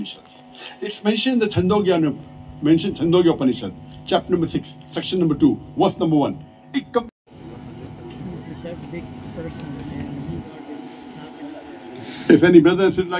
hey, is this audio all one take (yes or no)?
no